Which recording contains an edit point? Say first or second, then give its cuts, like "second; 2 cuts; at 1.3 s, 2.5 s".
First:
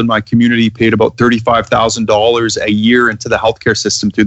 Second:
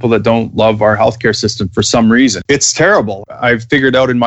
second; 2 cuts; at 2.4 s, 3.2 s